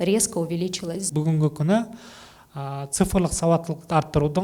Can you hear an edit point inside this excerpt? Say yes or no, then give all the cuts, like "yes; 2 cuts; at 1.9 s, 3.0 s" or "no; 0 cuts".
yes; 1 cut; at 1.1 s